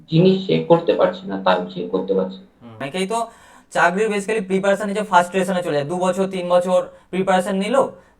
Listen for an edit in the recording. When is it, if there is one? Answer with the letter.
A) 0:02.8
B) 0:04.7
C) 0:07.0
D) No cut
A